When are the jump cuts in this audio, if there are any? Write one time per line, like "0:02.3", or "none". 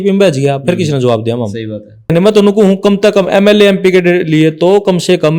0:02.1